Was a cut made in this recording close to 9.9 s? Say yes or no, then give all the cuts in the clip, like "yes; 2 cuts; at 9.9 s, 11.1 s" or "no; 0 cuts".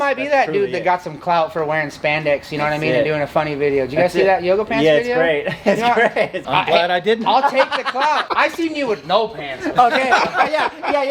no; 2 cuts; at 6.4 s, 8.3 s